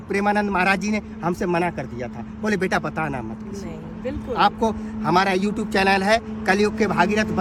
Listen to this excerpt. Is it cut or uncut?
uncut